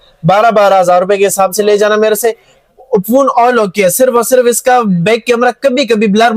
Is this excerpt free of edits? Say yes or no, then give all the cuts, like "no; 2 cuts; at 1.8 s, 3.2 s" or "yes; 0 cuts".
yes; 0 cuts